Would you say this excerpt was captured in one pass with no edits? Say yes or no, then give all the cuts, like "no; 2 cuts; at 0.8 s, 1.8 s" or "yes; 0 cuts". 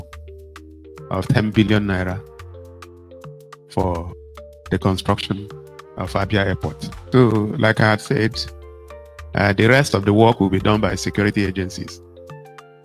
no; 1 cut; at 6.9 s